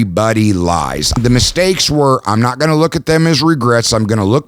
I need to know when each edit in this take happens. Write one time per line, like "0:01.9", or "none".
0:01.1